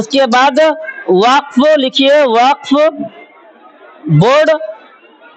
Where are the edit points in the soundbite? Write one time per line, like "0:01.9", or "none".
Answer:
none